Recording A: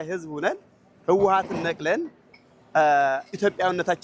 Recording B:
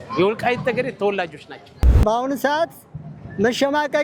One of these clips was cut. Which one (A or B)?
B